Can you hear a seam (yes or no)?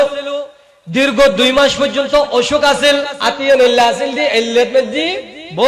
yes